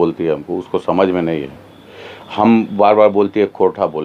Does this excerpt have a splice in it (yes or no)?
no